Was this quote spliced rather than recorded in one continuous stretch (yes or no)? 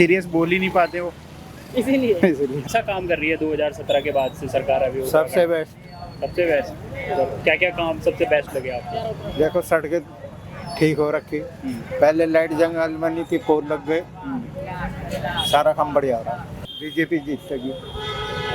yes